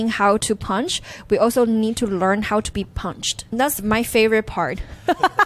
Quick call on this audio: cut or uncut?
cut